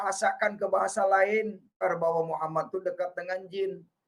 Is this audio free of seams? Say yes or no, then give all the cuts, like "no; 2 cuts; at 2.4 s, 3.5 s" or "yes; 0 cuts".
no; 1 cut; at 1.8 s